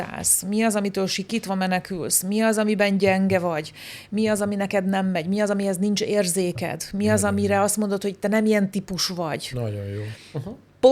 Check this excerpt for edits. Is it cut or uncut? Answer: uncut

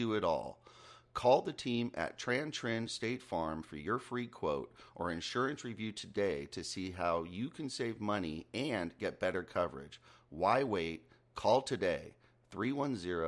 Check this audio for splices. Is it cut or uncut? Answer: uncut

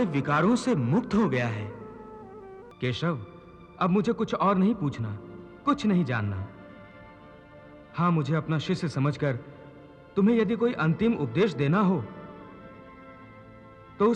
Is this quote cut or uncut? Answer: cut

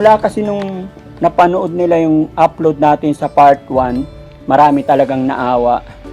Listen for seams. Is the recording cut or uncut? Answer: uncut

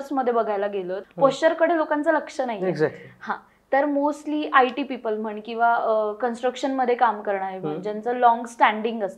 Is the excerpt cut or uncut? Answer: cut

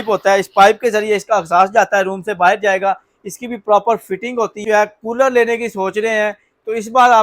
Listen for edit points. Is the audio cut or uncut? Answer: cut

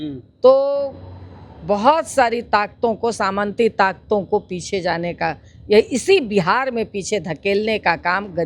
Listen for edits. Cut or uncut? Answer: uncut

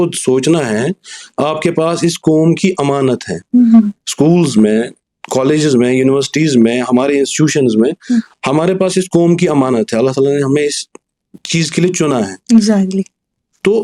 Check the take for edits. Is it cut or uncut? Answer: uncut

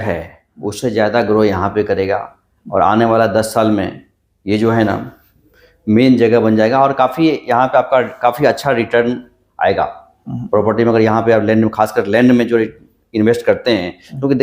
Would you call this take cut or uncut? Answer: uncut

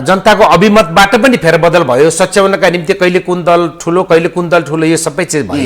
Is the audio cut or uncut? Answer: uncut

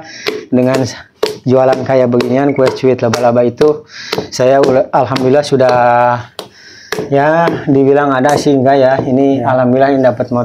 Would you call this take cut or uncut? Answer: uncut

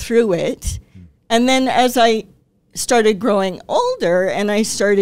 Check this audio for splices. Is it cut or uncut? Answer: uncut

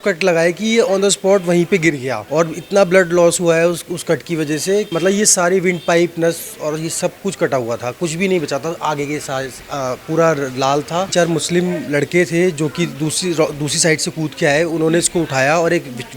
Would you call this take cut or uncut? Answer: cut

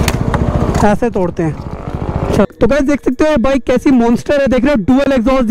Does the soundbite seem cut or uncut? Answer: cut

